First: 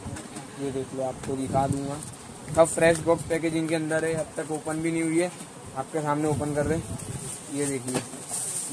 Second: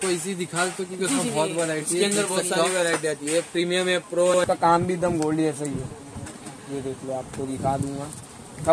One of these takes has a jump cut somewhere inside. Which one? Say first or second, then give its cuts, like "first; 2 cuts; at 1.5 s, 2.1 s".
second; 1 cut; at 4.4 s